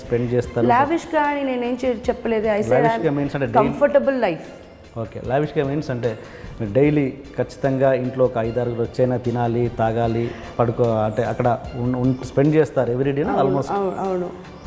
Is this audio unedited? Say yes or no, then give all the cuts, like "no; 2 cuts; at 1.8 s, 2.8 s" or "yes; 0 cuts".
yes; 0 cuts